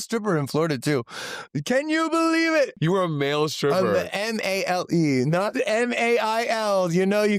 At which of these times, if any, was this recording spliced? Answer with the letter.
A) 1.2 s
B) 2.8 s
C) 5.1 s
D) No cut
B